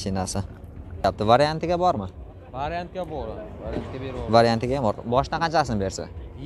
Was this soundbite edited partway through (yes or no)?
yes